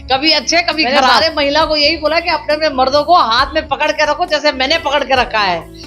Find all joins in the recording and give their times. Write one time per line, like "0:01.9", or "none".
0:01.2